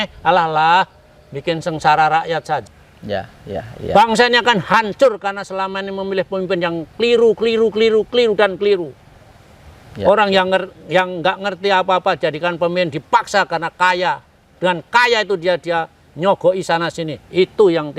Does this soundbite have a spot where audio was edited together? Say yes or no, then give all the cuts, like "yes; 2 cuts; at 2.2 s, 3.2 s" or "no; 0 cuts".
yes; 1 cut; at 2.6 s